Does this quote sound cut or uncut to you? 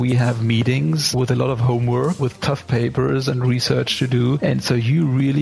cut